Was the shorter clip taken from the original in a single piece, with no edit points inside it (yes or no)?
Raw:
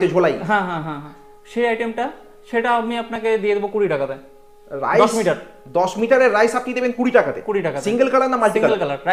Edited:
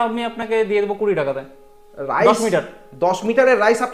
yes